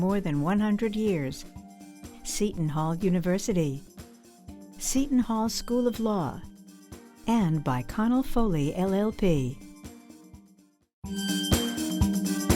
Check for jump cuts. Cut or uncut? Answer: cut